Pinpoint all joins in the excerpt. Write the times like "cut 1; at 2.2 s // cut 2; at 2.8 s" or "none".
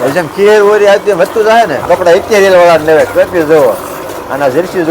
cut 1; at 1.8 s